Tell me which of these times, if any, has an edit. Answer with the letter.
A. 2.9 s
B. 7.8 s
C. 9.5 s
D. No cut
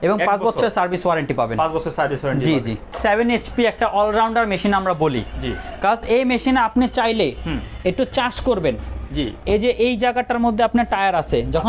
A